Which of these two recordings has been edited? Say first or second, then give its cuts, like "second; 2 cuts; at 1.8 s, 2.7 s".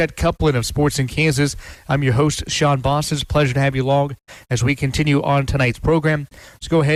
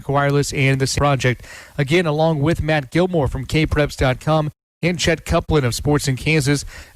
second; 1 cut; at 0.9 s